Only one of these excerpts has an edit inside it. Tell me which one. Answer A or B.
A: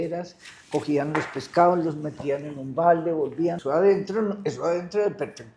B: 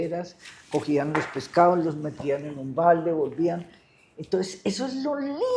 A